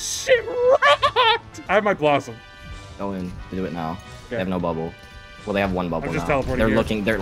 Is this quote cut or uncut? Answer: cut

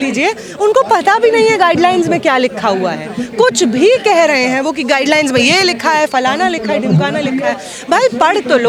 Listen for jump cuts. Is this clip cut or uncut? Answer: uncut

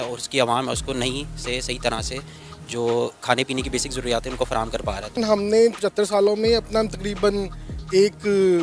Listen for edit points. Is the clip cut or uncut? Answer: cut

